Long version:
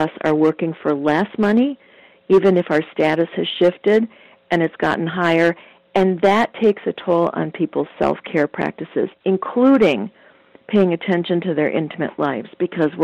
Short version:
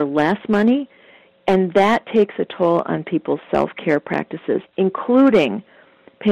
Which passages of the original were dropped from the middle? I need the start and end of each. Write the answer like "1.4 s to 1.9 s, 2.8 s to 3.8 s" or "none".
2.1 s to 5.7 s